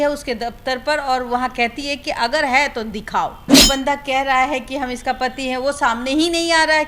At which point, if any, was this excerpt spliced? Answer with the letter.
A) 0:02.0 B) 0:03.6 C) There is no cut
B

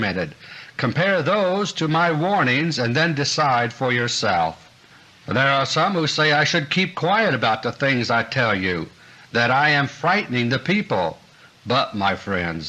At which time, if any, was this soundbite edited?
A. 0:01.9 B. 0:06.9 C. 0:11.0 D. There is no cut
D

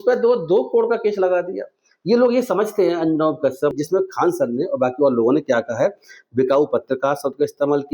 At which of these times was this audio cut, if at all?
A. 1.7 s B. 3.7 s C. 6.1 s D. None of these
B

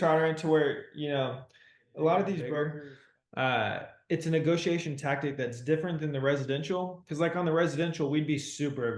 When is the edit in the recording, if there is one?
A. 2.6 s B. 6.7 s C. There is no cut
A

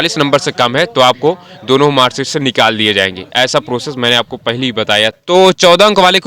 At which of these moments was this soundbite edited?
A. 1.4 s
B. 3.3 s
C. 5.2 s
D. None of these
C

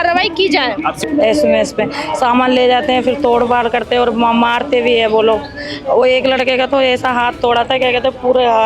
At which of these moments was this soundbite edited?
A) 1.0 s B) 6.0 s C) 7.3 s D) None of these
A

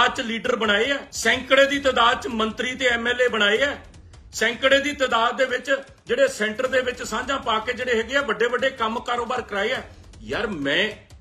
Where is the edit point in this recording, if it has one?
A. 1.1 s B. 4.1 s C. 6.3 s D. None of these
A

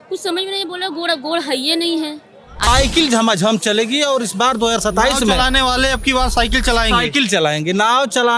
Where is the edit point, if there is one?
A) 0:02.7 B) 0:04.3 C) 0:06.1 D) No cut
A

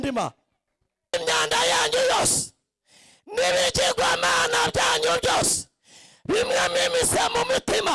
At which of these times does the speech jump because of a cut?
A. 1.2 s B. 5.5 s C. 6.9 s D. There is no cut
A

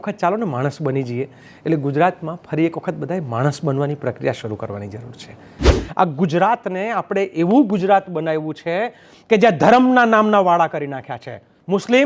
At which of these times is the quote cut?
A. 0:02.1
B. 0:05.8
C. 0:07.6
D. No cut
B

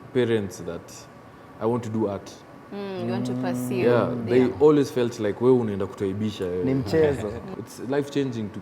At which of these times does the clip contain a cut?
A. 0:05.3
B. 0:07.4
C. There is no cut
B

